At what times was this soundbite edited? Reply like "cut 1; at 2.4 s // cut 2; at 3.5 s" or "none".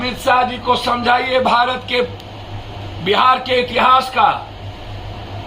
none